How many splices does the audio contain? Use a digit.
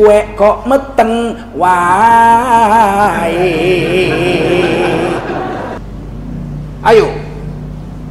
1